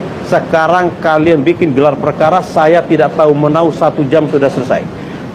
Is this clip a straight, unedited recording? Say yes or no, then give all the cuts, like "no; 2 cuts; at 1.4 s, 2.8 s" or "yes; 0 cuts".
yes; 0 cuts